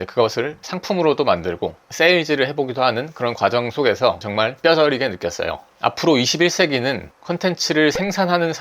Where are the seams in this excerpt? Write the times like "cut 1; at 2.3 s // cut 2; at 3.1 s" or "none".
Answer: cut 1; at 4.3 s // cut 2; at 5.6 s